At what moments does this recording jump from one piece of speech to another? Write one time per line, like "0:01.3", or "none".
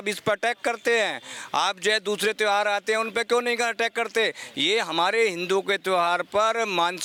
none